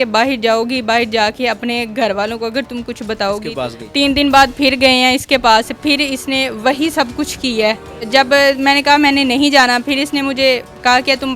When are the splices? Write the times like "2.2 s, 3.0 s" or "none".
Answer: 3.5 s, 8.0 s